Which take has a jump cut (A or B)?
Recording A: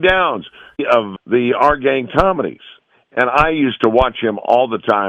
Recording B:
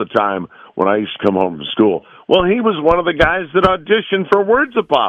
A